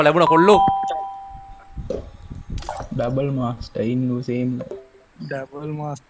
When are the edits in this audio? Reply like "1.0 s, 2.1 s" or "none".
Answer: none